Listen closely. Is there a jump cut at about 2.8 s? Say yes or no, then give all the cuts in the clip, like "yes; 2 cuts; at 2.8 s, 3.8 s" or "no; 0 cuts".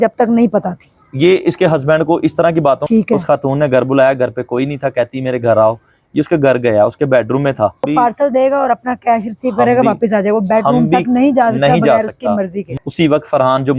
yes; 3 cuts; at 2.8 s, 7.9 s, 12.7 s